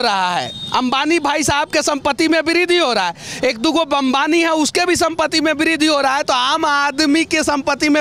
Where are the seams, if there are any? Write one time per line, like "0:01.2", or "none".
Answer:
none